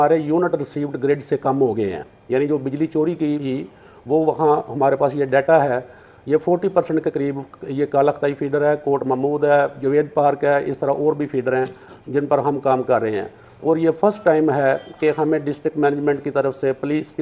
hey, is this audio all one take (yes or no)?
no